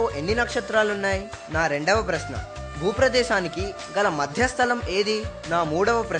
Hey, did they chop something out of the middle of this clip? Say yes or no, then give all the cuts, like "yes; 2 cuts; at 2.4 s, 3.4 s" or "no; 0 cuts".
yes; 2 cuts; at 1.4 s, 5.3 s